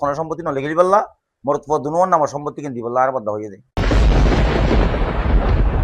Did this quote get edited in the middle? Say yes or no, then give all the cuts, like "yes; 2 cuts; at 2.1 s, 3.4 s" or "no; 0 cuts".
yes; 1 cut; at 3.6 s